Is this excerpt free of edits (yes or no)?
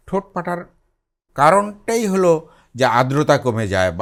yes